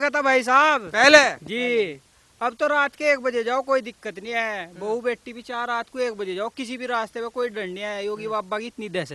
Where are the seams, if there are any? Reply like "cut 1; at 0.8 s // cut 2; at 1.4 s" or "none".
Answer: none